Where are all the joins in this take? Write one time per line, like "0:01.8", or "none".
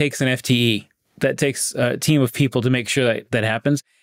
none